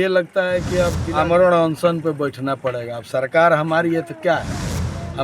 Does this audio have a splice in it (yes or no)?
yes